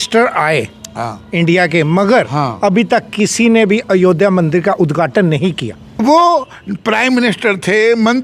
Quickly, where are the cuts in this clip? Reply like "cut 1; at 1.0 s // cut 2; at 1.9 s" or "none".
cut 1; at 6.0 s

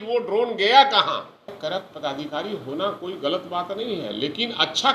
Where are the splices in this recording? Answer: cut 1; at 1.6 s

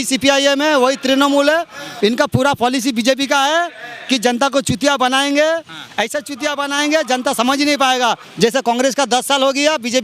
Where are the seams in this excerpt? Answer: cut 1; at 1.8 s // cut 2; at 8.3 s

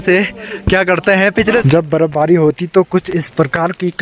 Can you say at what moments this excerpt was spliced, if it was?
cut 1; at 1.6 s

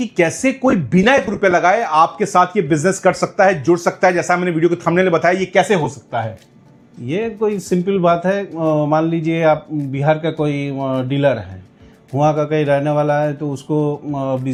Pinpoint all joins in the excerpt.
none

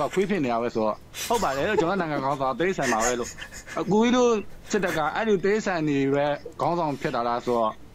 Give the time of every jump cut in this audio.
cut 1; at 3.6 s

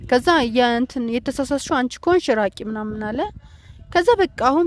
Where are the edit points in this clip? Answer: none

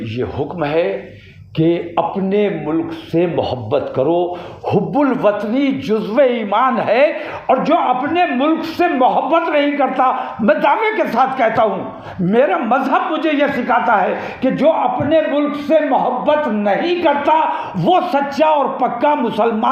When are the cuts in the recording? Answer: none

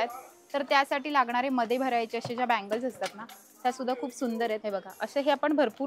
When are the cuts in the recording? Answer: cut 1; at 4.6 s

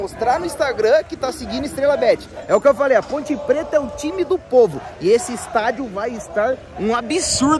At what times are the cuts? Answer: cut 1; at 2.3 s

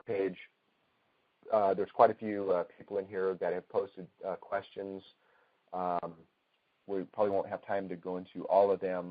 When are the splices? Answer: cut 1; at 8.0 s

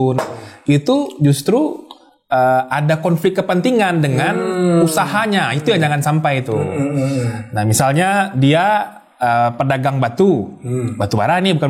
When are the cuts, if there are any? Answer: none

